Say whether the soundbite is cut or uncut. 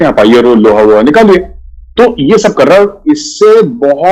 uncut